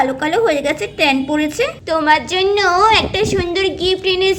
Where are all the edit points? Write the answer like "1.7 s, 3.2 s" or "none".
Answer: 1.7 s